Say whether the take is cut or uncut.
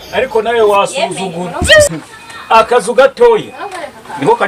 uncut